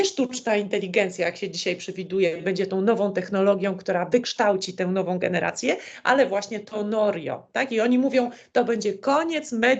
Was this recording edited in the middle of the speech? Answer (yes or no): no